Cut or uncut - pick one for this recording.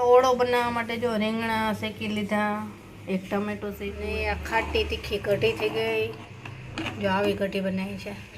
cut